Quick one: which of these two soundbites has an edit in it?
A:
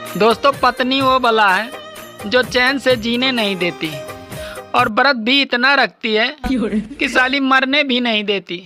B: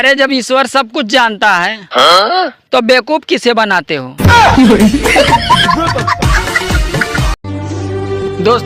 B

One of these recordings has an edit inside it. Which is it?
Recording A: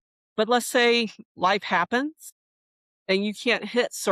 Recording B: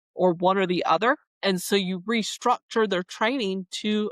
B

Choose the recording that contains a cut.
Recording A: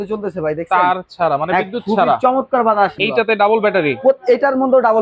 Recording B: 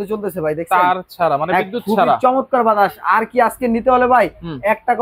A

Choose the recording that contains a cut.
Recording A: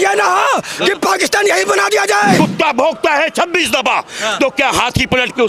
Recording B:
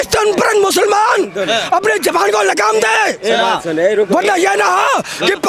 A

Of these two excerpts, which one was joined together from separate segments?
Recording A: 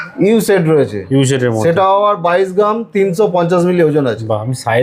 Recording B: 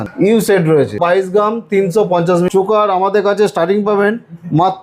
B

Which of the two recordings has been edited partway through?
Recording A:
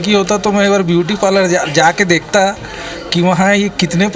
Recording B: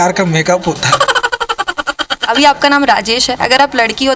B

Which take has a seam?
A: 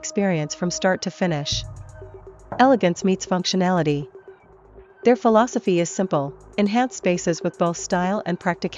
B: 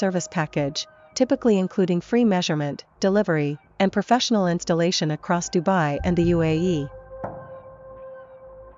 B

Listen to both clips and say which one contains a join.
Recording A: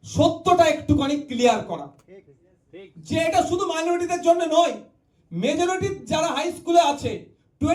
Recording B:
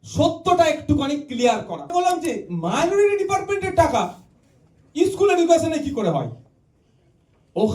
B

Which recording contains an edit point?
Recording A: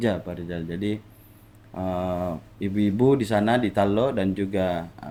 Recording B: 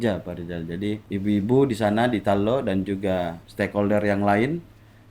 B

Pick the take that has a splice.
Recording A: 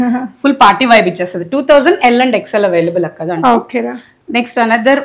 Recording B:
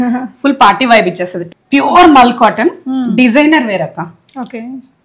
B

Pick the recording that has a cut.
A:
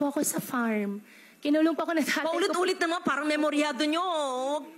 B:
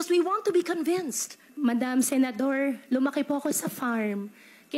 B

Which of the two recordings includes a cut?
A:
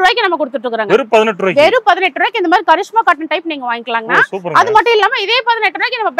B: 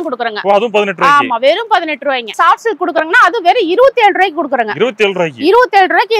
B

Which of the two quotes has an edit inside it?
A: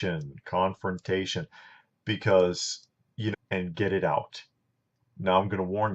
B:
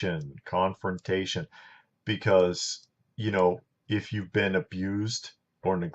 B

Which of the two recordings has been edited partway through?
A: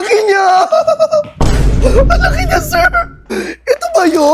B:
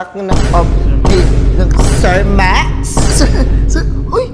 A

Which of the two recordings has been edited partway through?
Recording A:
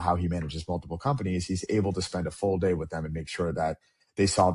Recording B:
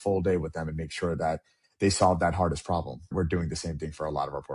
B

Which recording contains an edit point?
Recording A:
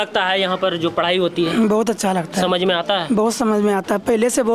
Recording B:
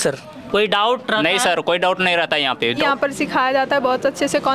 B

